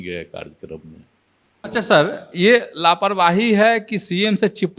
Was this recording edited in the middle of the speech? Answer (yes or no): yes